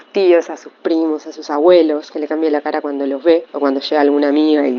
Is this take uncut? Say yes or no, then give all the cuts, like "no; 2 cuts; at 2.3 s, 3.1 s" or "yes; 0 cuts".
yes; 0 cuts